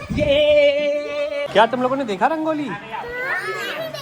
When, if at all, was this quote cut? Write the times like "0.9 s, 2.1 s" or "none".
1.5 s

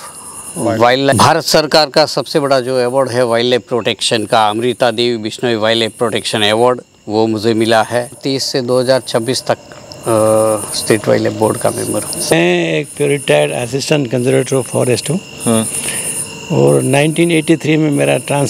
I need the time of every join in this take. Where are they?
1.1 s, 8.2 s, 12.3 s

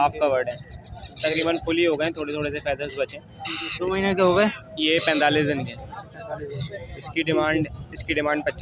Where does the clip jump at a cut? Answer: none

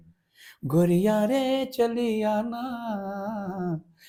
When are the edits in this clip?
none

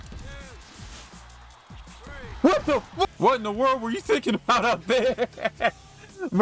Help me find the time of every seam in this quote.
3.1 s

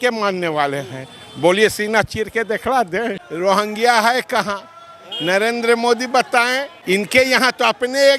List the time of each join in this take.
3.2 s, 6.7 s

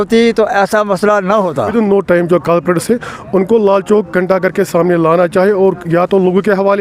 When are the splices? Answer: 1.7 s

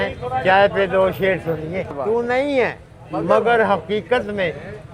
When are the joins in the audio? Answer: 2.0 s

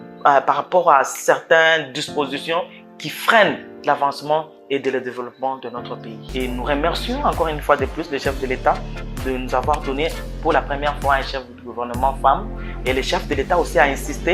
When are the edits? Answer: 6.2 s

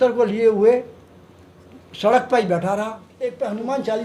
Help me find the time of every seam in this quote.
3.0 s

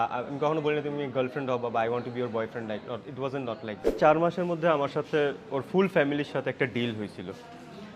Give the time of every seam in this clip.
4.0 s

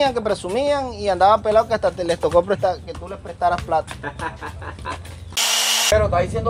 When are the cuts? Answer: 5.4 s

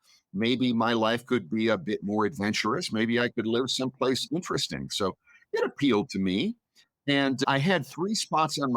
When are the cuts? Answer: 7.4 s

